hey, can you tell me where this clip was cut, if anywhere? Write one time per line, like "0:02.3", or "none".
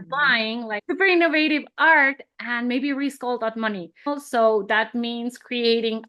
0:00.8
0:04.1